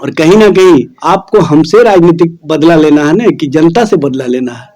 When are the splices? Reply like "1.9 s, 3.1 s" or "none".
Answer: 0.9 s, 2.4 s